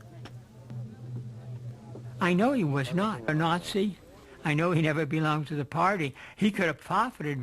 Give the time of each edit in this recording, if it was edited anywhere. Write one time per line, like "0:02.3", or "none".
0:02.9